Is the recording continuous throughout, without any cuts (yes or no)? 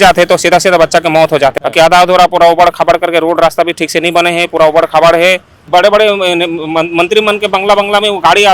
no